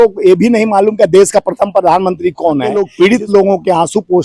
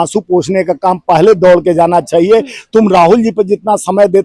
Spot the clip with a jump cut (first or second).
first